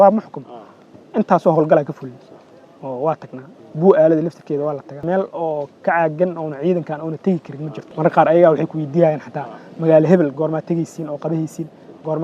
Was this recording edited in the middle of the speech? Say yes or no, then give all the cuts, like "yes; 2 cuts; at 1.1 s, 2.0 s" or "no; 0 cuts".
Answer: yes; 2 cuts; at 5.0 s, 7.9 s